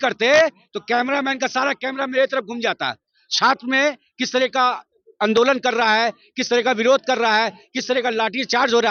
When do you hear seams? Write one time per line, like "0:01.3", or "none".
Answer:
none